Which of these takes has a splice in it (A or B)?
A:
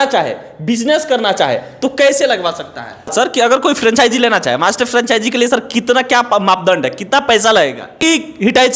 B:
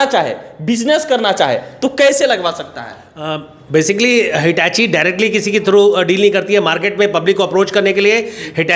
A